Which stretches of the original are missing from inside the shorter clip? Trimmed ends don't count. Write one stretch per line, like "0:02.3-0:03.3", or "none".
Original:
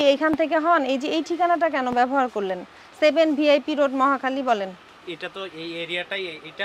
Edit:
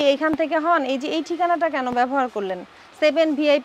none